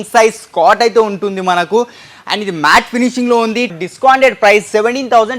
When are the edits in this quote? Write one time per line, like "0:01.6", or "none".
0:03.8